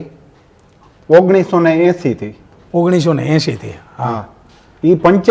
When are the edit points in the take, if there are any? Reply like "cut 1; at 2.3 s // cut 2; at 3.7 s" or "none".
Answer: none